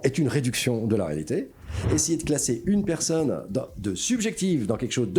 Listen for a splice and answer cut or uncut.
cut